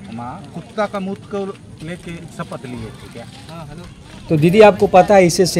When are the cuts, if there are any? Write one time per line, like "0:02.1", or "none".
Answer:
0:04.2